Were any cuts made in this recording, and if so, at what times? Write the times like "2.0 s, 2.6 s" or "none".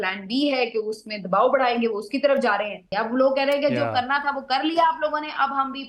2.9 s